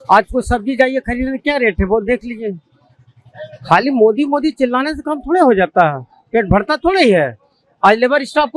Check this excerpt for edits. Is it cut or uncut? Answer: uncut